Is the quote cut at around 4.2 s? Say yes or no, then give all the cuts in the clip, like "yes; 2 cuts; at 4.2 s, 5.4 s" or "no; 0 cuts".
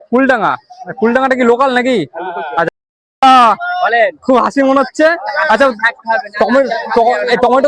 no; 1 cut; at 2.7 s